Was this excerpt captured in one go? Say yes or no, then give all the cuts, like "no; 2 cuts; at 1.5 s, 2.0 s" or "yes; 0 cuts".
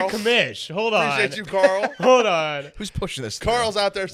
yes; 0 cuts